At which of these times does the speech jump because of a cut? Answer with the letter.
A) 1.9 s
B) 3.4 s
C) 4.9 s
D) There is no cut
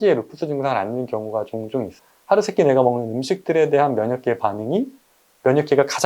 A